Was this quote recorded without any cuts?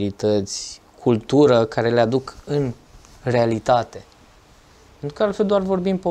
yes; 0 cuts

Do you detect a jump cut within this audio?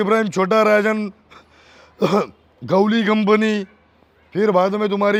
no; 0 cuts

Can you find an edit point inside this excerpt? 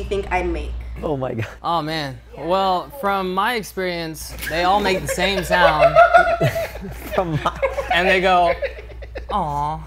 yes; 1 cut; at 1.0 s

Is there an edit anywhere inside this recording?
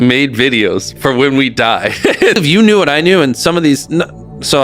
yes; 1 cut; at 2.4 s

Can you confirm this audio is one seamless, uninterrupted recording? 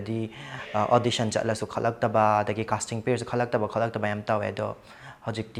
yes; 0 cuts

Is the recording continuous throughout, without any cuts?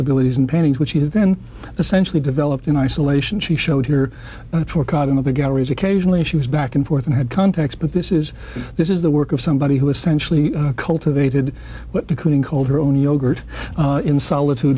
no; 1 cut; at 13.4 s

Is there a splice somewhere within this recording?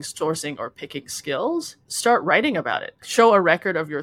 yes; 2 cuts; at 1.8 s, 2.9 s

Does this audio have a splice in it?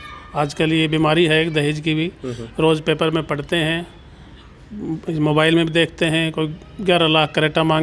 no; 0 cuts

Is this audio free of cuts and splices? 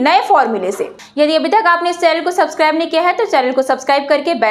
no; 1 cut; at 1.0 s

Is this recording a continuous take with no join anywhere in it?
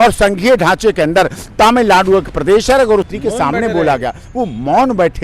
no; 1 cut; at 3.1 s

